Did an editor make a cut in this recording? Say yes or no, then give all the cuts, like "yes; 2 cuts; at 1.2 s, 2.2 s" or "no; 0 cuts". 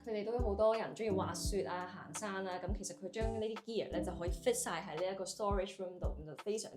no; 0 cuts